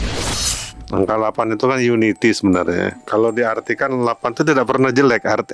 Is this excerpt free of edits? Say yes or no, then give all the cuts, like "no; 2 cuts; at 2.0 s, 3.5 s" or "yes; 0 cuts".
no; 1 cut; at 3.0 s